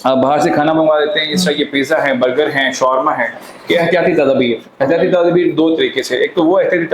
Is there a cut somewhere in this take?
yes; 1 cut; at 3.5 s

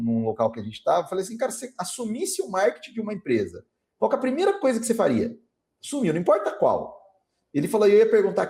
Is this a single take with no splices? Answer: yes; 0 cuts

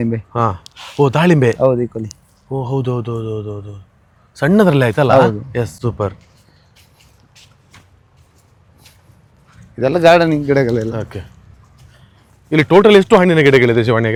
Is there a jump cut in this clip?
no; 0 cuts

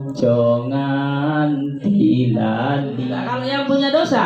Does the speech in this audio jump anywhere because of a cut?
yes; 1 cut; at 3.1 s

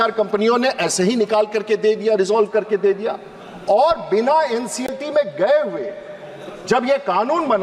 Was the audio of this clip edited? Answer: no; 0 cuts

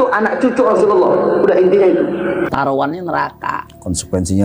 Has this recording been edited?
yes; 1 cut; at 2.5 s

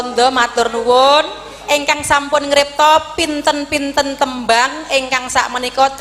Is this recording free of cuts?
yes; 0 cuts

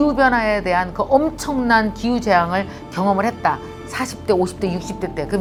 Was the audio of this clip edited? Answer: no; 0 cuts

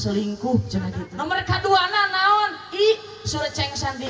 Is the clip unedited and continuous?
no; 1 cut; at 1.1 s

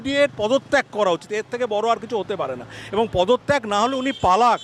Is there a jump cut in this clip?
no; 0 cuts

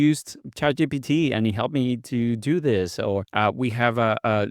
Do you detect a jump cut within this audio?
yes; 1 cut; at 3.3 s

